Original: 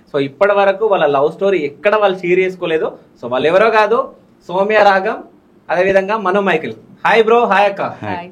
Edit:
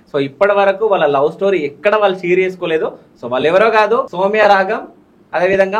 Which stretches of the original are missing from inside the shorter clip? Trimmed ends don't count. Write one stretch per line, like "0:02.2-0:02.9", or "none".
0:04.1-0:04.5

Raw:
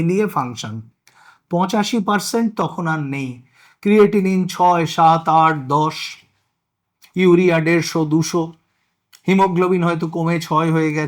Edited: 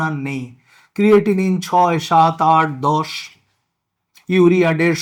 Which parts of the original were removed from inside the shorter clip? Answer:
none

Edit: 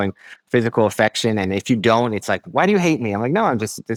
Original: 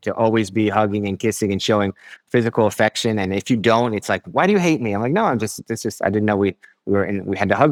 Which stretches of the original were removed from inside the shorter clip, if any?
none

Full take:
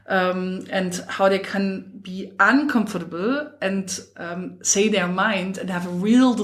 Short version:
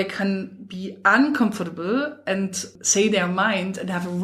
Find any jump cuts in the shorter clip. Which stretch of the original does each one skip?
0:04.1-0:04.6

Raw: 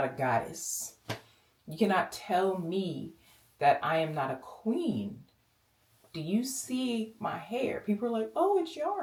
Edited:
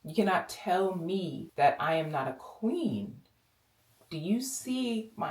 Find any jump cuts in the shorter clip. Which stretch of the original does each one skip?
0:03.0-0:03.4

